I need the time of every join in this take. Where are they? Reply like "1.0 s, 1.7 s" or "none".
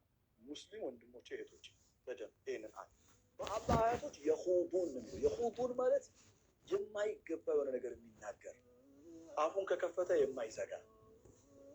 3.6 s